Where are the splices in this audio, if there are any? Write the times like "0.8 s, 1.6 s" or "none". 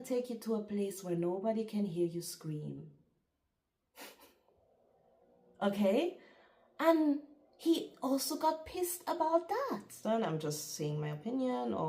9.9 s